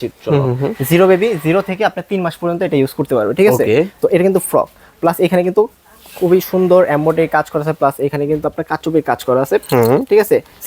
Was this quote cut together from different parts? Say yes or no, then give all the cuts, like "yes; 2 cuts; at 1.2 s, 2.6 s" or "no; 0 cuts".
no; 0 cuts